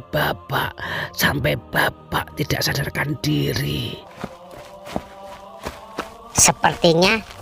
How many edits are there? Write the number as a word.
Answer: one